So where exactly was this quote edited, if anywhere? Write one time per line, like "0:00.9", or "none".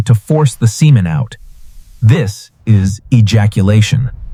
none